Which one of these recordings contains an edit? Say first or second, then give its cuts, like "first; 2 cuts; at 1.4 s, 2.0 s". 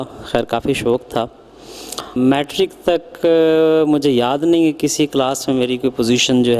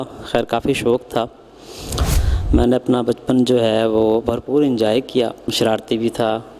second; 2 cuts; at 2.0 s, 5.5 s